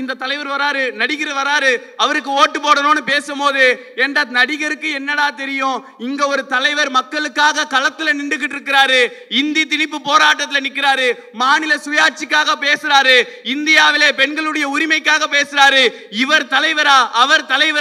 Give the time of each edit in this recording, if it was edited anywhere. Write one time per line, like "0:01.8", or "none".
none